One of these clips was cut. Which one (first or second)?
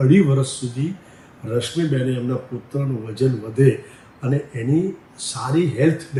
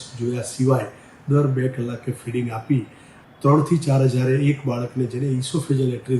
second